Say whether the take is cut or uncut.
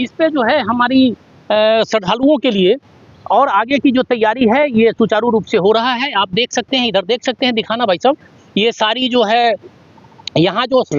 uncut